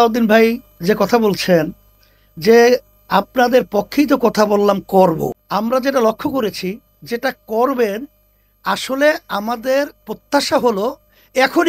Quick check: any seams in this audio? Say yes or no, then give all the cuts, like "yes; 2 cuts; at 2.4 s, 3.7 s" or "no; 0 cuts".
yes; 1 cut; at 5.4 s